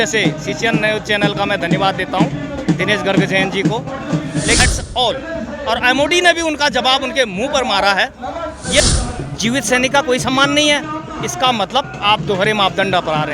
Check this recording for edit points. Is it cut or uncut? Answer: cut